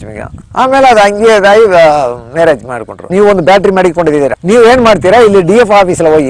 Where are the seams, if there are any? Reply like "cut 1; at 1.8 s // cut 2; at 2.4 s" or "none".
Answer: cut 1; at 3.0 s // cut 2; at 4.4 s